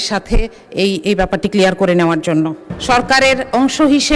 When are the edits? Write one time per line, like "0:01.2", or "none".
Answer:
0:02.7